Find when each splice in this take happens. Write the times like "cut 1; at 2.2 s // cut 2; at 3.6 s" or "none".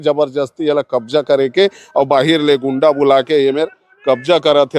none